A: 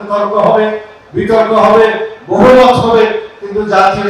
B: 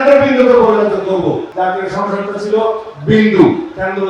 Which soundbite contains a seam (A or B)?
B